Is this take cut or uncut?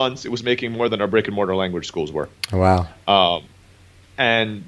uncut